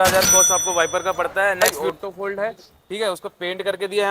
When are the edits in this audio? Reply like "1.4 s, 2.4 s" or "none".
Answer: 1.6 s